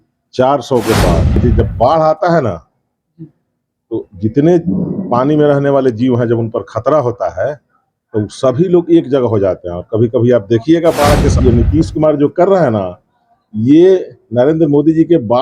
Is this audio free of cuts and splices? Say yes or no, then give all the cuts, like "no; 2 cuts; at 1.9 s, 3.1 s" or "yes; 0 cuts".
no; 2 cuts; at 1.4 s, 11.4 s